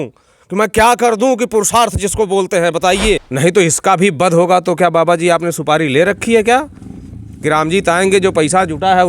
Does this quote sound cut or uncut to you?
cut